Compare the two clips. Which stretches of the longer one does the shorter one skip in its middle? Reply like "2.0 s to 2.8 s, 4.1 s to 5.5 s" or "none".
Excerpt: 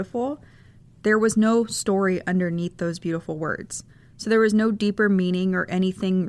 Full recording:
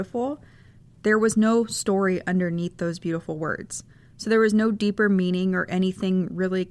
none